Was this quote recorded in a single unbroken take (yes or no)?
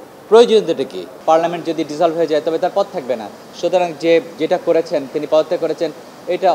no